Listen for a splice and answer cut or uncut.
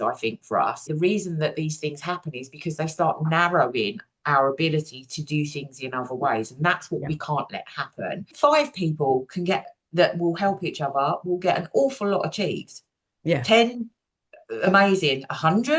cut